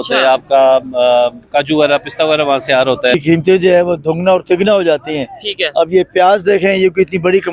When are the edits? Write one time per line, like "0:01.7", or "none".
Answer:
0:03.1